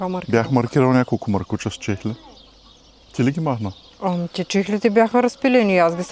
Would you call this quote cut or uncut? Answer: uncut